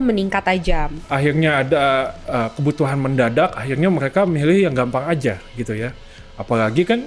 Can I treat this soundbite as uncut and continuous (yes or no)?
no